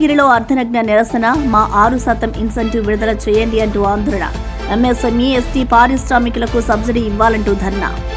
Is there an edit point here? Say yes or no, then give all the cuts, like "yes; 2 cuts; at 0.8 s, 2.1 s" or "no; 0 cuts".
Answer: no; 0 cuts